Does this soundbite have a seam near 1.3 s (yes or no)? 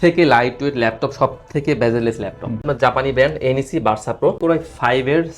no